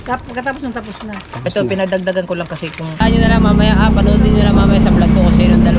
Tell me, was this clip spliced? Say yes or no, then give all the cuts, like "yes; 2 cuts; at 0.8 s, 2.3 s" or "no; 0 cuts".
yes; 1 cut; at 3.0 s